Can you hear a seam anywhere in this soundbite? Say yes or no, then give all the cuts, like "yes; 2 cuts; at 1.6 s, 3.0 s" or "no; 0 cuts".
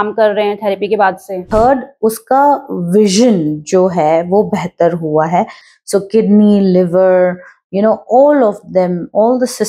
yes; 2 cuts; at 1.5 s, 5.6 s